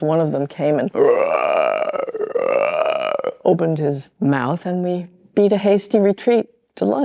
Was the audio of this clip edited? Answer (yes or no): no